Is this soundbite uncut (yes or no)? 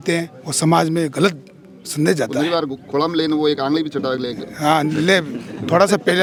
yes